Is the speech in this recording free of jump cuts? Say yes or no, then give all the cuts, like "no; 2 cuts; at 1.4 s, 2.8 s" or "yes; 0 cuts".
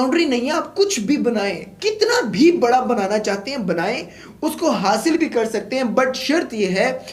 yes; 0 cuts